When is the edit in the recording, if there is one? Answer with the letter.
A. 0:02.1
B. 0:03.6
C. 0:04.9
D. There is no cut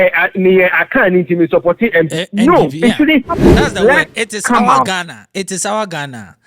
B